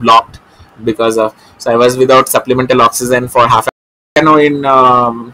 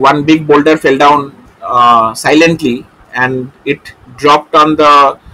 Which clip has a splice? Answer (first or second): first